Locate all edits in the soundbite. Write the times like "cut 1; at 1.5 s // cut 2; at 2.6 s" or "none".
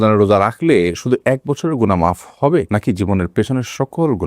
cut 1; at 2.7 s